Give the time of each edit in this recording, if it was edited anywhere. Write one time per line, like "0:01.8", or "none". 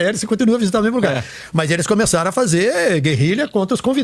none